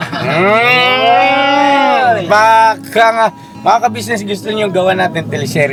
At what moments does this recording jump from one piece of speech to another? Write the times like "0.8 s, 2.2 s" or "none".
none

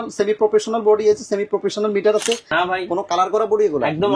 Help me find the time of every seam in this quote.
2.5 s

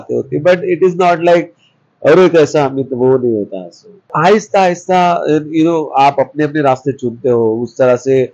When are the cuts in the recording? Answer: 4.1 s

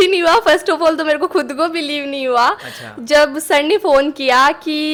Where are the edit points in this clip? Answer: none

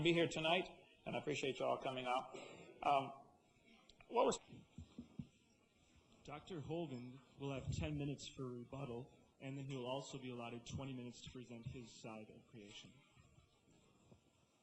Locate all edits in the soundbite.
none

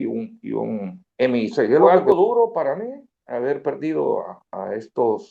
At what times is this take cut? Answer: 1.9 s

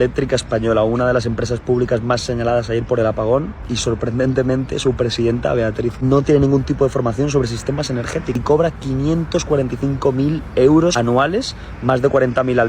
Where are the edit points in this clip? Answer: 8.3 s

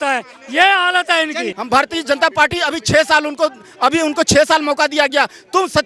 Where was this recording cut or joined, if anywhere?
1.5 s

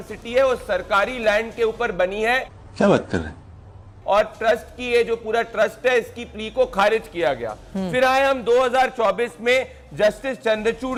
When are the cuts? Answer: none

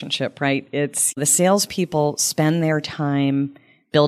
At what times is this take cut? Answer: 1.2 s

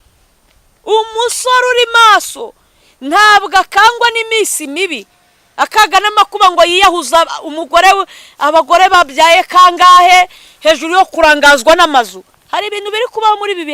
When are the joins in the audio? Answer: none

